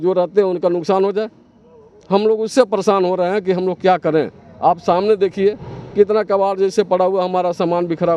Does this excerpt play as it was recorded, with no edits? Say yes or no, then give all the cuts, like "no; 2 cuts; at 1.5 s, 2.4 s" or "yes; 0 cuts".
yes; 0 cuts